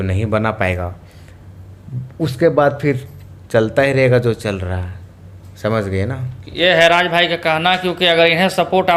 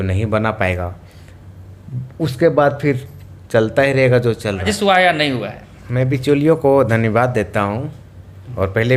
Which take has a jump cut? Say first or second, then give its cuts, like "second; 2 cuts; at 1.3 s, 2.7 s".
second; 1 cut; at 4.6 s